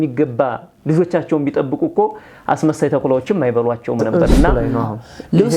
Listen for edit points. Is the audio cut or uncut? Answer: cut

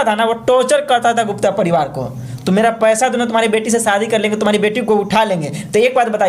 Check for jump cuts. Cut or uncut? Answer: uncut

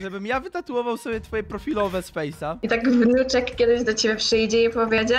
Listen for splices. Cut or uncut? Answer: cut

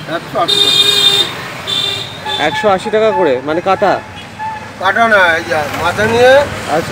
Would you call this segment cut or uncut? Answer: uncut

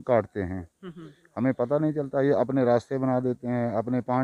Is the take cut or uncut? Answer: uncut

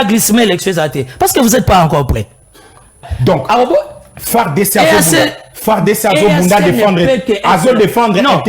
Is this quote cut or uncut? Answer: cut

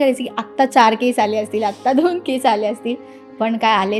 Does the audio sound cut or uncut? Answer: uncut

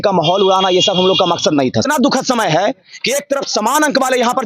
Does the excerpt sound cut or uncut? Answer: cut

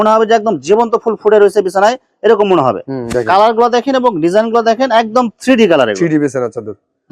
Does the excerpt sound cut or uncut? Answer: uncut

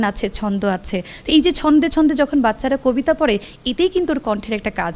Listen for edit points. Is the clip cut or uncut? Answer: uncut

